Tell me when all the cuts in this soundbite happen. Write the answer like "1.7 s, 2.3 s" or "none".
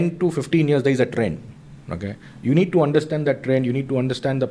none

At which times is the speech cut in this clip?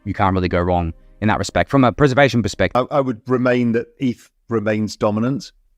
2.7 s

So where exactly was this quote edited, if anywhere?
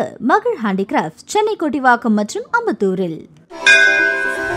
3.3 s

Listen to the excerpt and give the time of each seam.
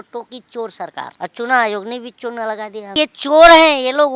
1.1 s, 3.0 s

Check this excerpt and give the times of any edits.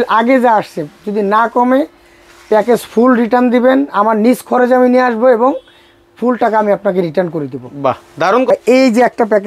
none

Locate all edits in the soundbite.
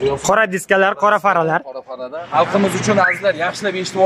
2.2 s

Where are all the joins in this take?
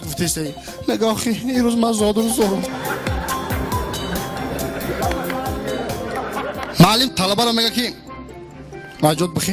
5.6 s

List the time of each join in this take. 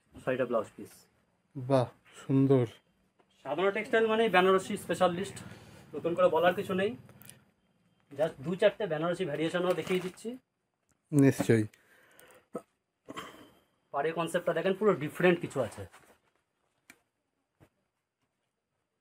none

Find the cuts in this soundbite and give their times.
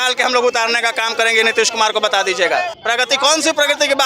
2.7 s

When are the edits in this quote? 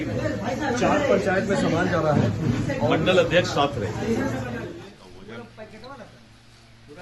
4.7 s

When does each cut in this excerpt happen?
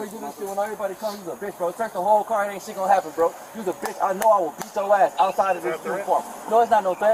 none

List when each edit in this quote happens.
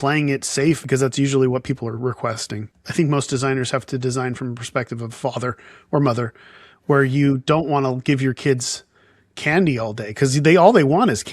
0.8 s, 2.6 s

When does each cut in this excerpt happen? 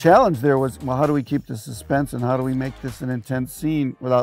none

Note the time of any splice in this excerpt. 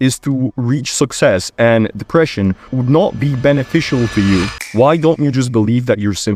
none

